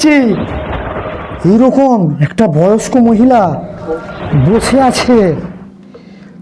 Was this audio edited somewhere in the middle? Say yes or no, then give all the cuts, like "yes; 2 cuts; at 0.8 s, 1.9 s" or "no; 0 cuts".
no; 0 cuts